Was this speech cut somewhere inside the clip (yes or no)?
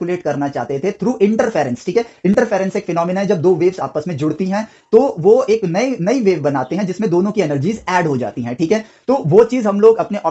no